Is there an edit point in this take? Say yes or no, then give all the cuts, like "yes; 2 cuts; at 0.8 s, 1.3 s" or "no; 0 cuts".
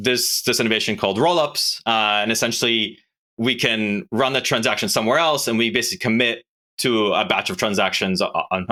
no; 0 cuts